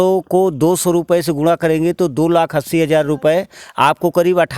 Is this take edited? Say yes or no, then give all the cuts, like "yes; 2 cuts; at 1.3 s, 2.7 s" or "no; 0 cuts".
no; 0 cuts